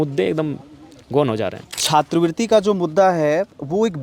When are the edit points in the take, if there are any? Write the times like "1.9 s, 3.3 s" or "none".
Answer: 1.7 s